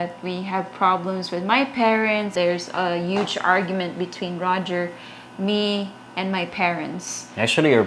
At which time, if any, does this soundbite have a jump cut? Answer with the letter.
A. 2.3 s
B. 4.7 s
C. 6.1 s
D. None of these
A